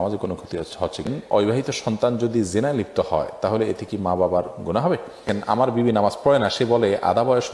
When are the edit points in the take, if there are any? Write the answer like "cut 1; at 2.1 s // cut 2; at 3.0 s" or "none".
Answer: cut 1; at 1.4 s // cut 2; at 5.3 s